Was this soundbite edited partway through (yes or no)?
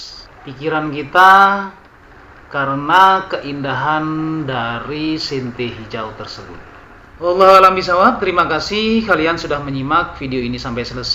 no